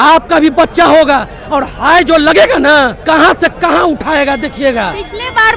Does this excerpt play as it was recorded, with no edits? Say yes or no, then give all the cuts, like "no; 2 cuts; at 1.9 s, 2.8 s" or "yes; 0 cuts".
no; 1 cut; at 3.0 s